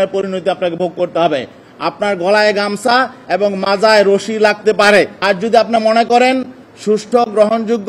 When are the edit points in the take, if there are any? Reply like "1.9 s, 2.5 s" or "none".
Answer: 5.2 s